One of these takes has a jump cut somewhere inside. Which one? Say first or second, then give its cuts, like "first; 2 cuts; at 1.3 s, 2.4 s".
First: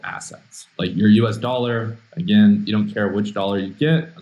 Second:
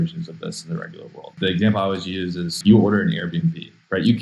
second; 2 cuts; at 1.3 s, 2.5 s